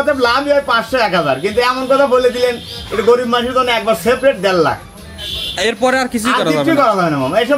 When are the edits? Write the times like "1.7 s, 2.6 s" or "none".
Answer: none